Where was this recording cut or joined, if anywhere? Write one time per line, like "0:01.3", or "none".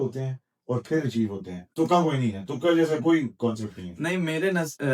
none